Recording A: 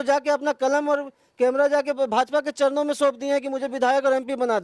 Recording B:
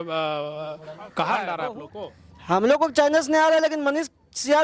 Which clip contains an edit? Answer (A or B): B